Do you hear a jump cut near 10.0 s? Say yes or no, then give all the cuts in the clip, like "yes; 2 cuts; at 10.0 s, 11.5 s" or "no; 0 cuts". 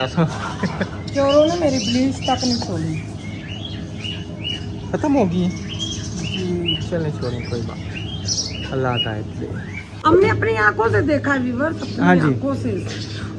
yes; 1 cut; at 10.0 s